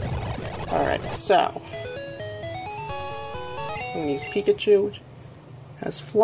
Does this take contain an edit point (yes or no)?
yes